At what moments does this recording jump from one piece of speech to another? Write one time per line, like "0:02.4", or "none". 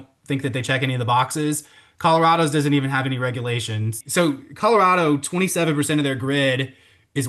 0:04.0

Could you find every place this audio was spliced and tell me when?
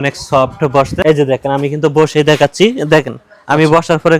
0:00.9

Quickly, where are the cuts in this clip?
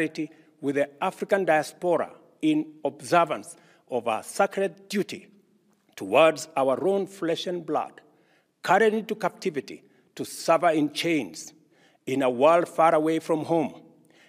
none

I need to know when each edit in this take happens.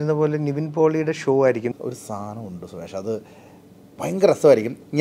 0:01.7

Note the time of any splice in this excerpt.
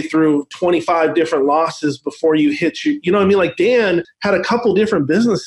0:04.1

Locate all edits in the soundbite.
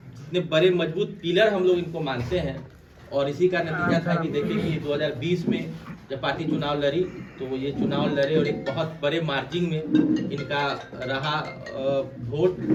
none

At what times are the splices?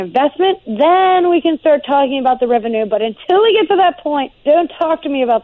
0:04.3

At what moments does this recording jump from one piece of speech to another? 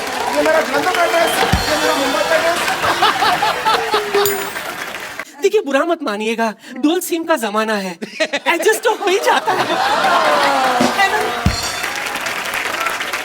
0:05.2

